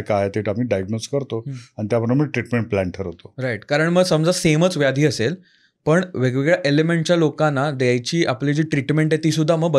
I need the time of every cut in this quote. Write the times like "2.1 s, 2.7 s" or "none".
none